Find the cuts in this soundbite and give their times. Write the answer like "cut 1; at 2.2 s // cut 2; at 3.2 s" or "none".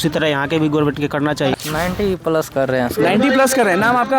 cut 1; at 1.5 s